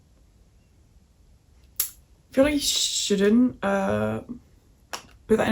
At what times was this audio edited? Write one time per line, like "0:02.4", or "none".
none